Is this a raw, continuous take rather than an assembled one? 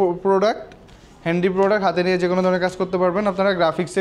yes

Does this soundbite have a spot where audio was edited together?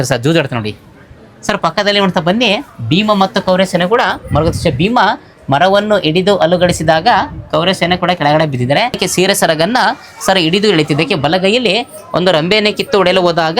yes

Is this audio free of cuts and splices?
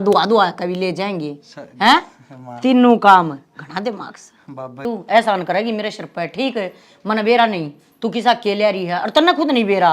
no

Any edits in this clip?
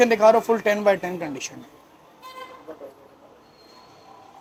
no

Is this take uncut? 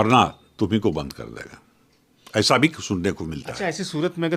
yes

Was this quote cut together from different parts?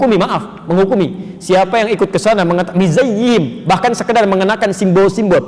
no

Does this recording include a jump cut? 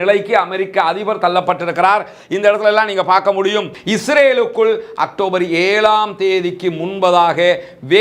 yes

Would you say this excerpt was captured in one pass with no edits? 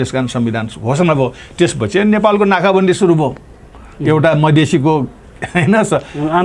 yes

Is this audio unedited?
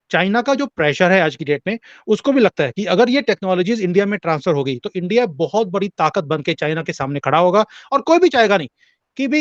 yes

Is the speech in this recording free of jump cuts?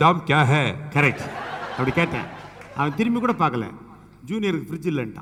yes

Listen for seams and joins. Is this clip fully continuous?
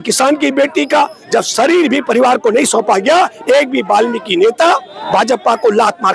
yes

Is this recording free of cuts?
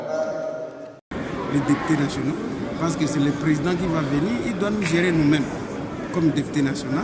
no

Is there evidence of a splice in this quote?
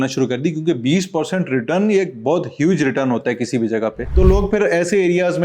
yes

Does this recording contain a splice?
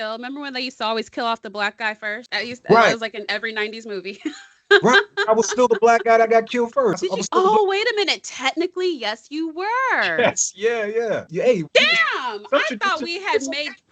yes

